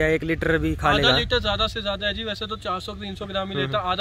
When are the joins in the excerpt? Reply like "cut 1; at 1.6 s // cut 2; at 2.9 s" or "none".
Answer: none